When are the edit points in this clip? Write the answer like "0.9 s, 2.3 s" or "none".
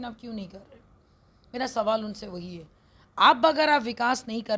none